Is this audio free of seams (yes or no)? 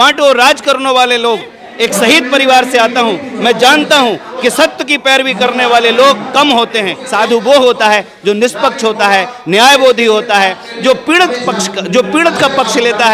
no